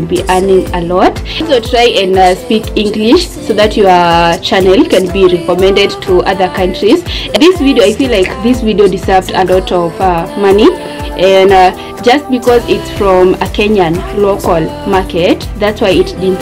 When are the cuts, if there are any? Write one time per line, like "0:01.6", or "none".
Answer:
none